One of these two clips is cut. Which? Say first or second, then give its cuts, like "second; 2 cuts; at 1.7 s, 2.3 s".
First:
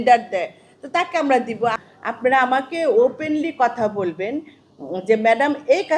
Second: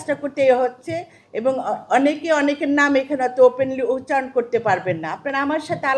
first; 1 cut; at 1.7 s